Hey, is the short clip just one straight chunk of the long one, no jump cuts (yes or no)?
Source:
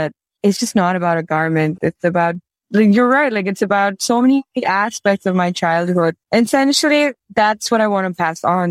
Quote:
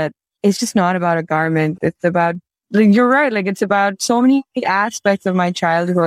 yes